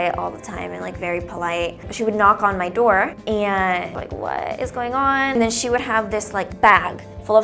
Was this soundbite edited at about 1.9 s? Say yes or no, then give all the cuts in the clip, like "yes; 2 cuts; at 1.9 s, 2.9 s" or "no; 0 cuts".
yes; 1 cut; at 1.9 s